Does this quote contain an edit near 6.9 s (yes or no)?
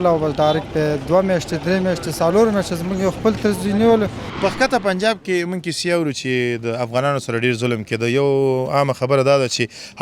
no